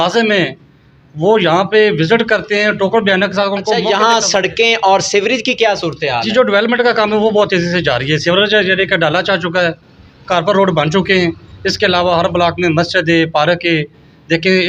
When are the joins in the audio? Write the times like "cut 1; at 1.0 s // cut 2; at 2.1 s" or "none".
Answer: cut 1; at 3.8 s